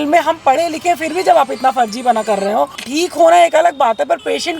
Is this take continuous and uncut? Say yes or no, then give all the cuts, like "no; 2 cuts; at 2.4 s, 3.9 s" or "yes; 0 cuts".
no; 1 cut; at 2.8 s